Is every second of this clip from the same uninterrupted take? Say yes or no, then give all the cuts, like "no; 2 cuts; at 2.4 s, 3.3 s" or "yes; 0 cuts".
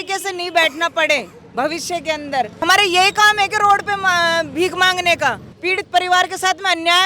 no; 2 cuts; at 2.6 s, 5.5 s